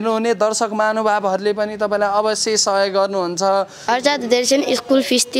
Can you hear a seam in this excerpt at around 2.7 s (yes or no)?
no